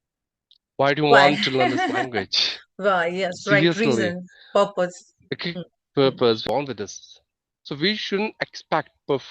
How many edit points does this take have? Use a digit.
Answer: 1